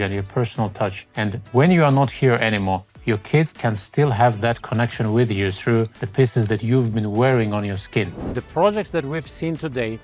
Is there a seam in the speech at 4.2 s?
no; 4 cuts; at 1.0 s, 2.9 s, 6.0 s, 8.2 s

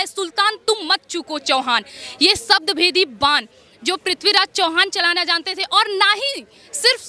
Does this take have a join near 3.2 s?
no; 0 cuts

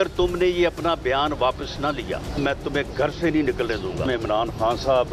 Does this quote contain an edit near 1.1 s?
no; 2 cuts; at 2.3 s, 4.0 s

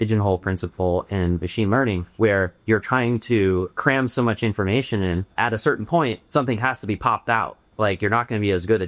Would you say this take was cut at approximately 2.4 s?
yes; 4 cuts; at 2.4 s, 3.7 s, 5.3 s, 6.2 s

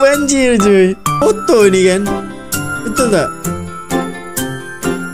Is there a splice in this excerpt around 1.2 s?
yes; 1 cut; at 1.2 s

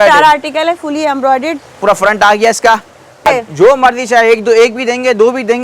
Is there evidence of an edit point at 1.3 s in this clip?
no; 1 cut; at 3.3 s

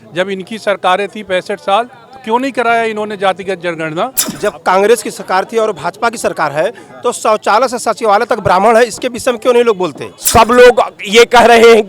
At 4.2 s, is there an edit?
yes; 2 cuts; at 4.2 s, 10.1 s

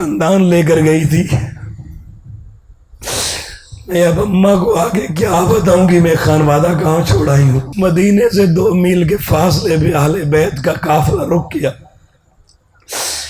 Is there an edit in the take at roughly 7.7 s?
yes; 1 cut; at 7.7 s

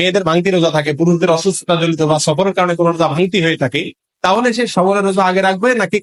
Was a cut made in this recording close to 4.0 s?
no; 0 cuts

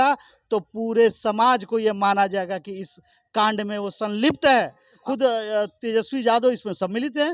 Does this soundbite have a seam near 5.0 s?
yes; 1 cut; at 5.0 s

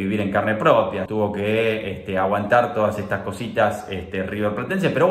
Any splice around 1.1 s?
yes; 1 cut; at 1.1 s

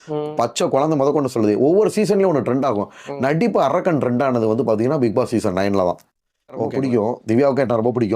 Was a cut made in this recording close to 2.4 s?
no; 1 cut; at 6.7 s

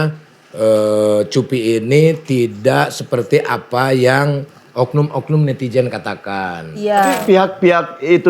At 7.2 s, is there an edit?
yes; 1 cut; at 7.2 s

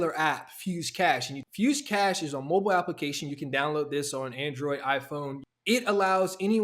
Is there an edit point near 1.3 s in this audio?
yes; 2 cuts; at 1.3 s, 5.4 s

